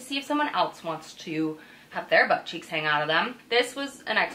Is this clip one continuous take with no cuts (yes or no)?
no